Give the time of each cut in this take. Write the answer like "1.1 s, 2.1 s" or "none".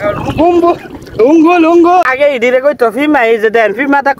2.1 s